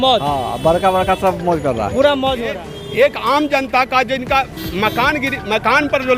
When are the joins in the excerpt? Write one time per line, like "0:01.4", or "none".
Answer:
0:02.7